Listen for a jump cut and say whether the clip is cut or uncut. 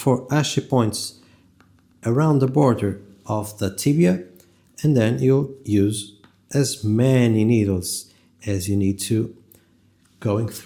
uncut